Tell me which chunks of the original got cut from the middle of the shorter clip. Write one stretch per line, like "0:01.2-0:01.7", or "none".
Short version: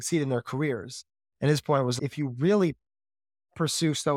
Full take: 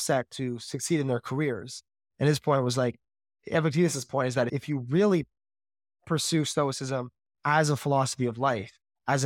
0:02.8-0:04.5